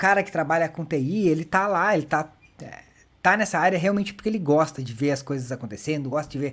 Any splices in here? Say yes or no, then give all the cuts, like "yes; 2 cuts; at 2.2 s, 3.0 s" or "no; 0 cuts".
no; 0 cuts